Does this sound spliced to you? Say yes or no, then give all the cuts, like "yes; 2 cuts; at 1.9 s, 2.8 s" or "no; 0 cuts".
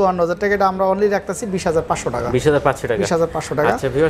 no; 0 cuts